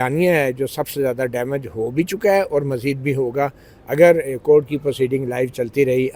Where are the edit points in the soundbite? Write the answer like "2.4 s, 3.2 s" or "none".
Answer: none